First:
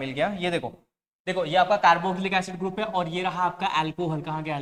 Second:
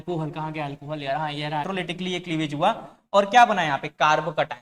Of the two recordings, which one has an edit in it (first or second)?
second